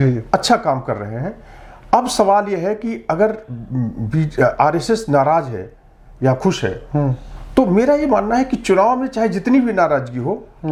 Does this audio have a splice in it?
no; 0 cuts

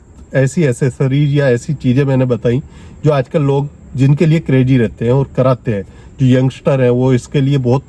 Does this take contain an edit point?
no; 0 cuts

